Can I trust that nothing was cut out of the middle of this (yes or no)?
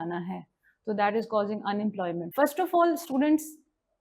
no